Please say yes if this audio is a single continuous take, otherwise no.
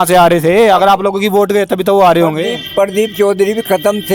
yes